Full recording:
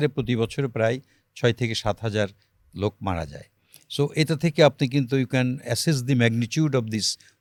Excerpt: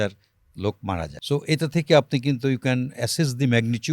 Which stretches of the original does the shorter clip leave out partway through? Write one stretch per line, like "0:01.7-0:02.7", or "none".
0:03.3-0:03.8